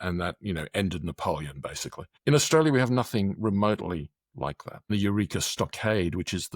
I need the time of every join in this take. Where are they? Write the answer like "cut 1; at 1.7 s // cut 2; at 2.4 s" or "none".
cut 1; at 4.9 s